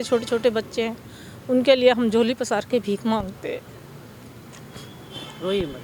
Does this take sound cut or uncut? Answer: uncut